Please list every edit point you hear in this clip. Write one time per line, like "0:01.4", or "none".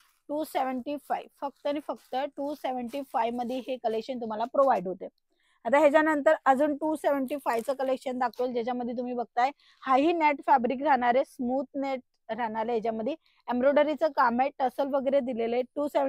none

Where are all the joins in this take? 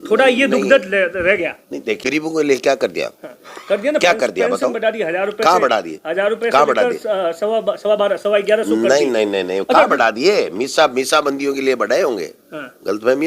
0:02.0

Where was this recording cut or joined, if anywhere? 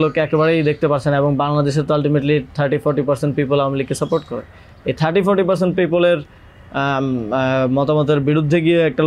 none

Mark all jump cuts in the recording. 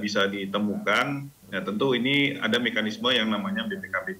0:01.4

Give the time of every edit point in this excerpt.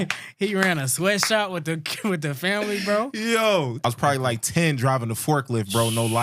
0:03.8

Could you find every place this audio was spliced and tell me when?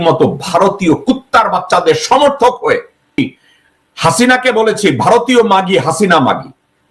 0:03.2

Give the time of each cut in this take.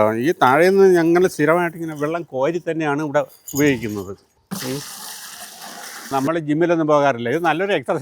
0:04.3
0:06.1

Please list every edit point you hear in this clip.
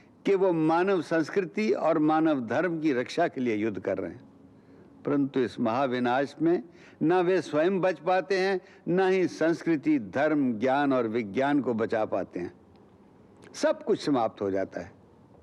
none

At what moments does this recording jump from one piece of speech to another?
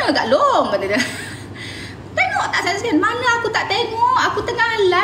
none

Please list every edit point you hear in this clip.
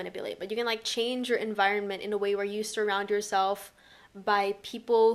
none

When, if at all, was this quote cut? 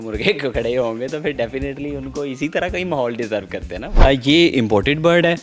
0:03.8

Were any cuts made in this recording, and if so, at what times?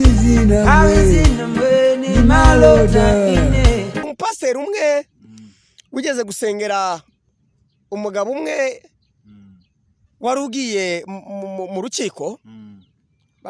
0:04.1

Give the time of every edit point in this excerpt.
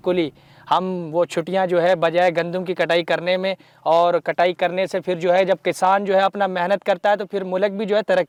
none

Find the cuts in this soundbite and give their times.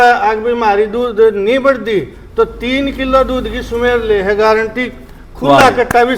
none

